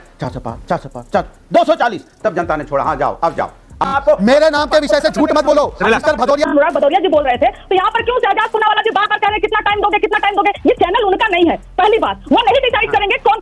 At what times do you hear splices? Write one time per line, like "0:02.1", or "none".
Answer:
0:03.9
0:06.5